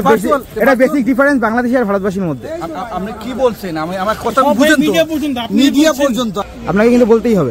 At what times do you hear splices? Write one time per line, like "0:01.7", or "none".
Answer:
0:06.4